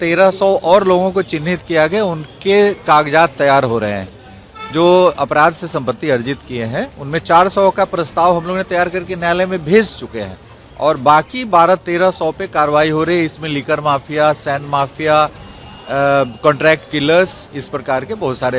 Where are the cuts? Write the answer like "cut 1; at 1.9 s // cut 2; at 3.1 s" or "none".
none